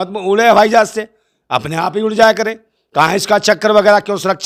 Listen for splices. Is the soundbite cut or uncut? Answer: uncut